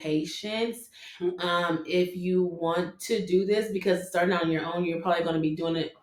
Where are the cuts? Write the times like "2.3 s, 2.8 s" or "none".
none

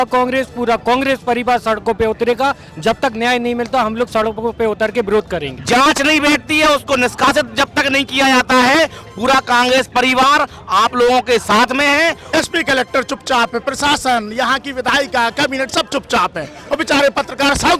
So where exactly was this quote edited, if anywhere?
5.5 s, 12.2 s

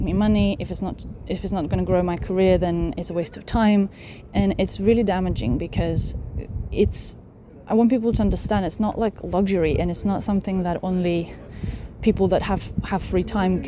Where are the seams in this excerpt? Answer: none

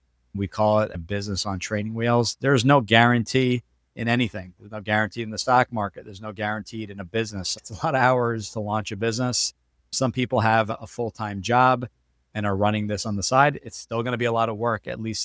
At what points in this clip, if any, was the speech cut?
7.5 s

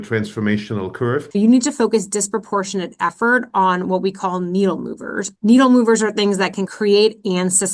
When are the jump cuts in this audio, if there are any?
1.3 s

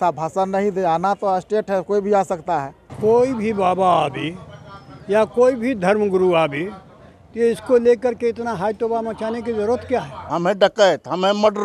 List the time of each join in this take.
2.8 s, 10.2 s

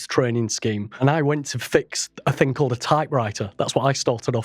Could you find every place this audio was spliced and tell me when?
1.0 s

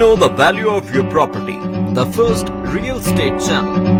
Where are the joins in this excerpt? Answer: none

